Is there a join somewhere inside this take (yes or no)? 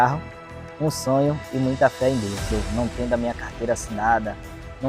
yes